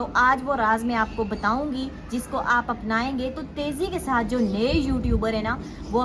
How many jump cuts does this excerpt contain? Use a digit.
0